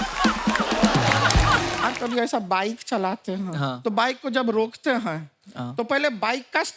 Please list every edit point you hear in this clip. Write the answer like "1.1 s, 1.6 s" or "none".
1.8 s